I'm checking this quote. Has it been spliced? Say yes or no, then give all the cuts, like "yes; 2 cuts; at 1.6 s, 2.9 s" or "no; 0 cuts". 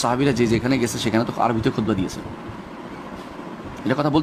no; 0 cuts